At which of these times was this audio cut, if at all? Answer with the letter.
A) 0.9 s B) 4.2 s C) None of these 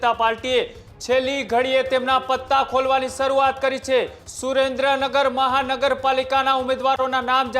B